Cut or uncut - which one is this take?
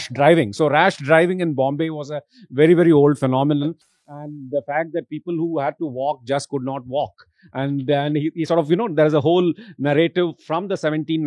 uncut